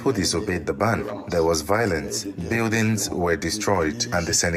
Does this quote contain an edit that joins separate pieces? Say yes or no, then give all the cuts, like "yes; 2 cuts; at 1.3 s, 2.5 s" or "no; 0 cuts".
no; 0 cuts